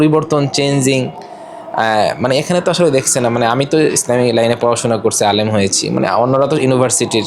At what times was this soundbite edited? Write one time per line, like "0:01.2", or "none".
none